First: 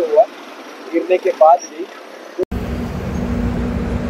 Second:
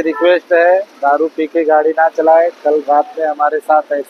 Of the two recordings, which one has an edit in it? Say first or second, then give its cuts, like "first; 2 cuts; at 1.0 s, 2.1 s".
first; 1 cut; at 2.4 s